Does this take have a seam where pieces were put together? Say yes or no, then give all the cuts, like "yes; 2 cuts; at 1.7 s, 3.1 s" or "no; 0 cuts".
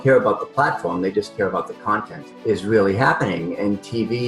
yes; 1 cut; at 2.1 s